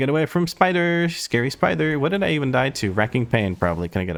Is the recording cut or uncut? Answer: uncut